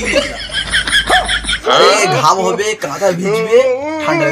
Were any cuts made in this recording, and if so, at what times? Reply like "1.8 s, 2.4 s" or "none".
1.5 s

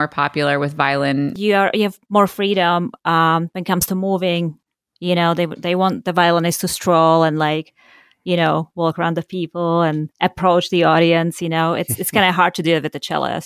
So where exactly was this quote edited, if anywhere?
1.3 s, 4.7 s

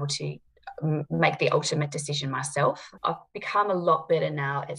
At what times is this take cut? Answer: 2.9 s

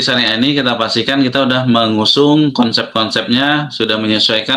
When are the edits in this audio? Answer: none

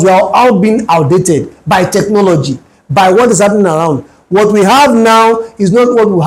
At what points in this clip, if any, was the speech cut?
none

